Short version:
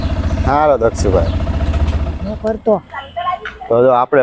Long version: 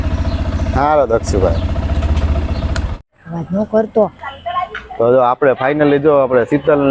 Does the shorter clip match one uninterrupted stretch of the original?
no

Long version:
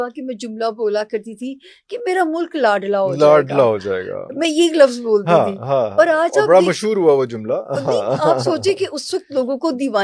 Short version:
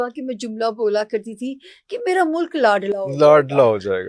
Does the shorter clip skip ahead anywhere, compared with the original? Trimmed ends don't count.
no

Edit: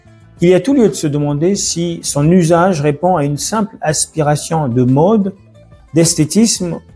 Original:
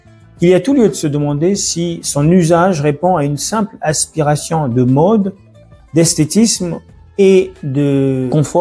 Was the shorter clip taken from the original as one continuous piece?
yes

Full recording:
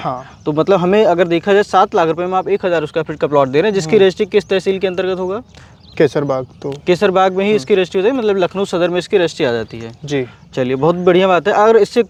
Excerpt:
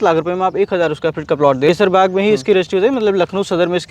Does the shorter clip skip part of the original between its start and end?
yes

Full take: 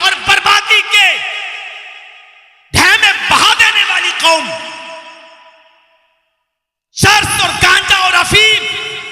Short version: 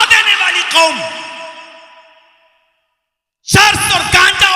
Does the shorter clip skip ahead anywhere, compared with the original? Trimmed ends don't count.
no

